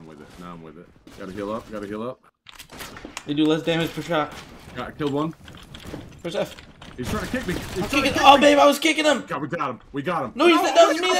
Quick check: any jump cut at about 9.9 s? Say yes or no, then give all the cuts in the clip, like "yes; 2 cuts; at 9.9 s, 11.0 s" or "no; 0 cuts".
no; 1 cut; at 1.0 s